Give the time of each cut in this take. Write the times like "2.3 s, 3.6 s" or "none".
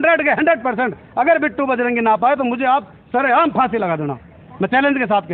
none